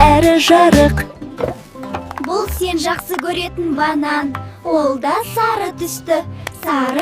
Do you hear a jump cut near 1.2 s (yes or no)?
yes